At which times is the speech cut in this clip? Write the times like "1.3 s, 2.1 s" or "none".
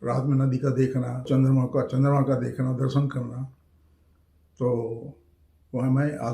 1.3 s

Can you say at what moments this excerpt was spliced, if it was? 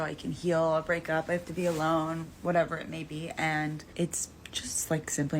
3.8 s

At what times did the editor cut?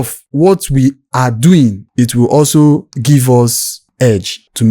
1.9 s

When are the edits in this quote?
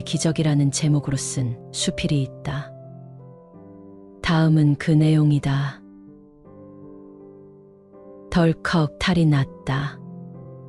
6.1 s, 7.6 s

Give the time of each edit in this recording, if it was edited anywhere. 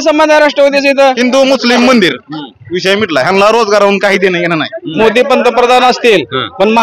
1.2 s, 4.8 s

